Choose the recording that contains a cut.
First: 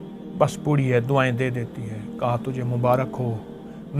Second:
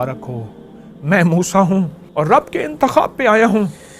second; 1 cut; at 2.0 s

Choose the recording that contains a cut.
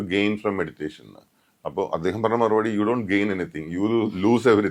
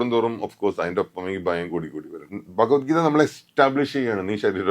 second; 1 cut; at 2.1 s

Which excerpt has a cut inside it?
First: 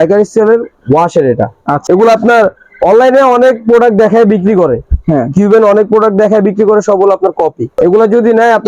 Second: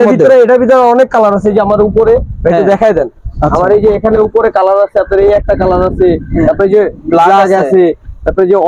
first; 2 cuts; at 1.8 s, 7.7 s

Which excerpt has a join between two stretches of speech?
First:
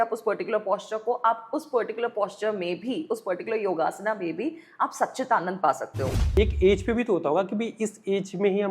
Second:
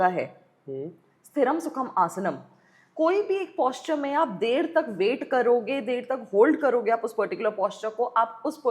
first; 1 cut; at 6.2 s

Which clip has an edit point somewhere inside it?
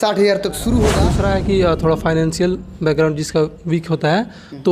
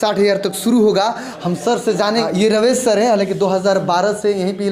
first; 1 cut; at 1.1 s

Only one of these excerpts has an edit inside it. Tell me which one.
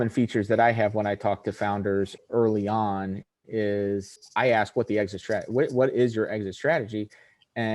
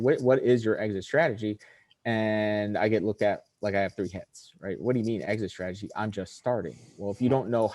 first; 2 cuts; at 2.2 s, 4.2 s

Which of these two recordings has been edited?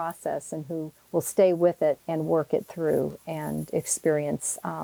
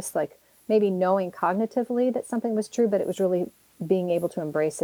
first; 2 cuts; at 1.0 s, 2.0 s

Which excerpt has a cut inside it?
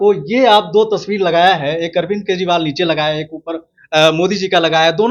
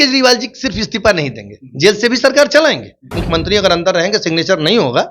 second; 1 cut; at 3.2 s

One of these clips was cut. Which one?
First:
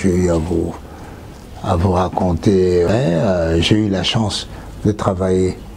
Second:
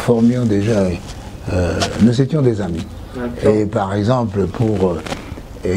first; 1 cut; at 2.9 s

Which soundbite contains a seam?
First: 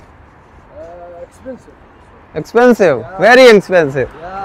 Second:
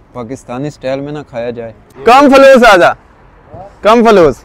second; 1 cut; at 1.9 s

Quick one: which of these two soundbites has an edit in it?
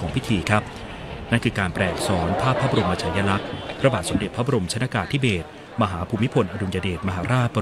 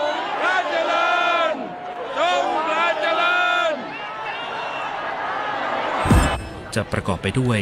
second; 1 cut; at 6.4 s

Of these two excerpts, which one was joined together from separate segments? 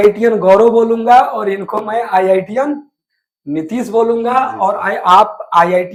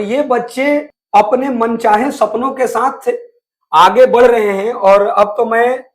second; 1 cut; at 1.0 s

